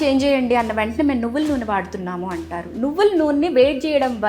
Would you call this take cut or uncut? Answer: uncut